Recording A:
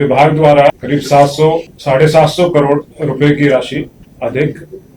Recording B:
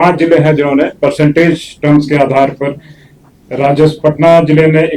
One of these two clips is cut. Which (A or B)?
A